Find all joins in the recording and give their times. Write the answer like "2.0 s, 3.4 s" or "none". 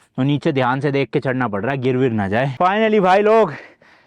2.5 s